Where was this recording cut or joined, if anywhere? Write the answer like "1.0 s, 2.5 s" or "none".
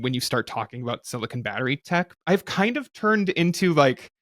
2.2 s